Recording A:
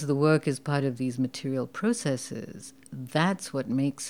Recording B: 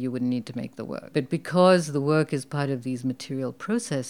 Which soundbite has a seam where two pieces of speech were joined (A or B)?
B